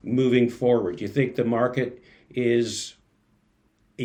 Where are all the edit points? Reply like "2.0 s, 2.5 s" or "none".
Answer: none